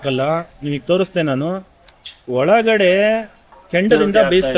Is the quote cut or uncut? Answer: uncut